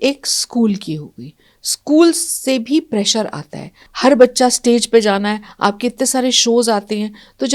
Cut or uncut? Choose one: cut